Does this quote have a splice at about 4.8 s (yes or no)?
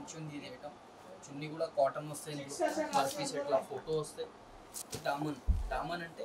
yes